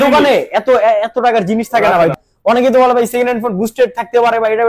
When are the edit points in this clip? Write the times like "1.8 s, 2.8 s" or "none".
2.1 s